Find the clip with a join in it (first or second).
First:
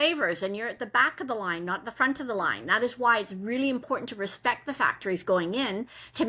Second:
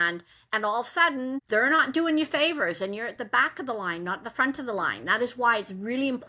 second